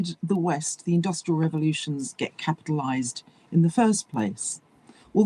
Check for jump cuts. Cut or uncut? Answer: uncut